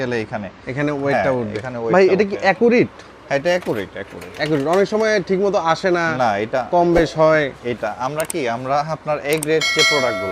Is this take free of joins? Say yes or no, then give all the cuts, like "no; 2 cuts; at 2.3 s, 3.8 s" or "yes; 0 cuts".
yes; 0 cuts